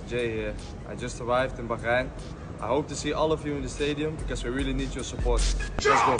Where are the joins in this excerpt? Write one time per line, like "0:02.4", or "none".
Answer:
none